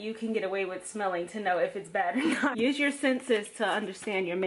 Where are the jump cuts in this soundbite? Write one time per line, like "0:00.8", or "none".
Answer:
0:02.5

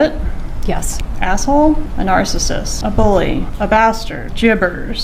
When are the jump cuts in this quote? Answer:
none

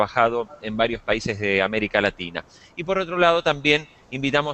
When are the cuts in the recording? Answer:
0:01.5

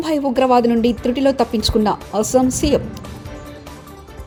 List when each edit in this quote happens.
none

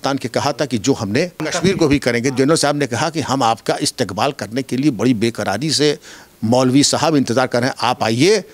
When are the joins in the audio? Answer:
0:01.5

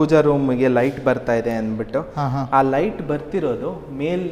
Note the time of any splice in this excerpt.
none

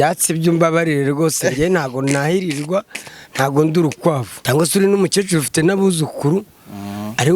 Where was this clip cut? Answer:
0:04.3

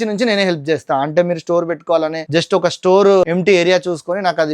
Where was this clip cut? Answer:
0:02.2
0:03.2

